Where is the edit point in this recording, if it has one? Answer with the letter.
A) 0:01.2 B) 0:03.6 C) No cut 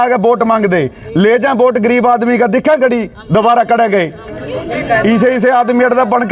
C